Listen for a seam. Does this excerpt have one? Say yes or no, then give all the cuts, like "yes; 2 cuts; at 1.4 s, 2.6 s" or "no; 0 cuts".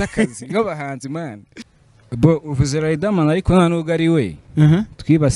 yes; 1 cut; at 1.5 s